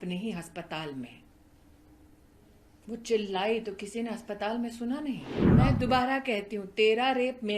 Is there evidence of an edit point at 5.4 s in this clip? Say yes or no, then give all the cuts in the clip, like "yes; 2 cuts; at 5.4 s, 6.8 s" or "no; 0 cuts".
yes; 1 cut; at 5.4 s